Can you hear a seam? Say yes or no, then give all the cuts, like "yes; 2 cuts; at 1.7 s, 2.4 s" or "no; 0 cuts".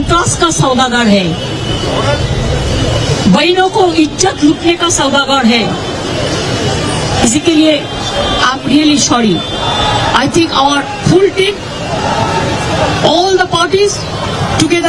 no; 0 cuts